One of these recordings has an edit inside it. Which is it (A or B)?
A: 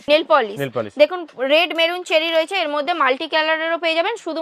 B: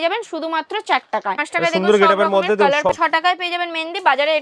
B